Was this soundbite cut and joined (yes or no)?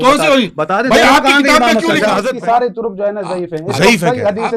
yes